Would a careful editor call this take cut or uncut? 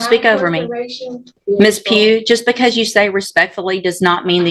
cut